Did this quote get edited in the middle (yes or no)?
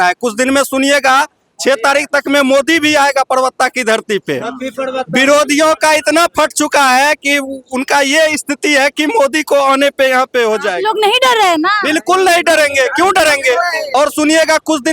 yes